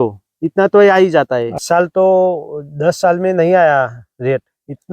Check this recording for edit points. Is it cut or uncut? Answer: cut